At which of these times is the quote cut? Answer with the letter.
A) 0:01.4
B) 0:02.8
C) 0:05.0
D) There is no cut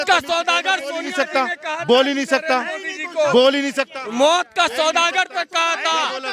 D